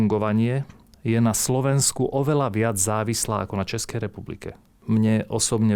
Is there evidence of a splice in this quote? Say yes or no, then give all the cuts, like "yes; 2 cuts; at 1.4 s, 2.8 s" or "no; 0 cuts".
yes; 1 cut; at 4.7 s